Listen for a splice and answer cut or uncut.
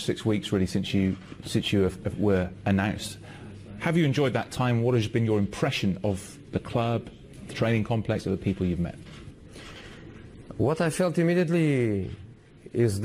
cut